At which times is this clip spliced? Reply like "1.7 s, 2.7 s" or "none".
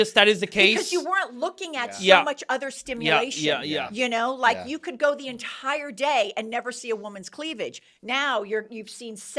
none